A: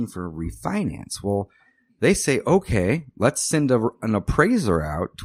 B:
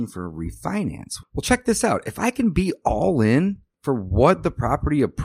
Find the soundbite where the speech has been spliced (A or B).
B